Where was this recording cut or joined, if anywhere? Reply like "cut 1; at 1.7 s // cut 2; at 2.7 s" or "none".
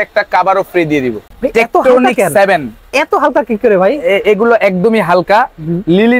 cut 1; at 1.2 s